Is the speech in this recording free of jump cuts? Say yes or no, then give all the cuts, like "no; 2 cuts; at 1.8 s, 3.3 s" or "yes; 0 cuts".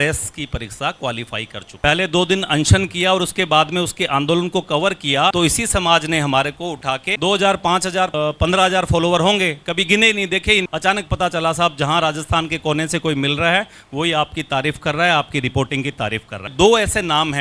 no; 2 cuts; at 1.8 s, 16.5 s